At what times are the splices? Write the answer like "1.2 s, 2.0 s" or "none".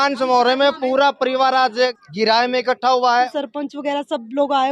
2.0 s, 3.3 s